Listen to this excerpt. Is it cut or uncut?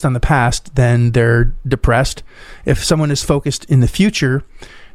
uncut